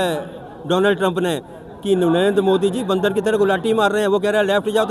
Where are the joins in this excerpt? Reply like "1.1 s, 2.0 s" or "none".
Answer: none